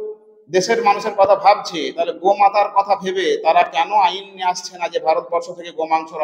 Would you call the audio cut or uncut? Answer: uncut